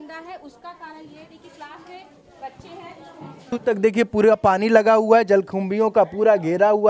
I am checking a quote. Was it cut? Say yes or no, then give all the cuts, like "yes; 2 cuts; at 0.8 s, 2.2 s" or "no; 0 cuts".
yes; 1 cut; at 3.5 s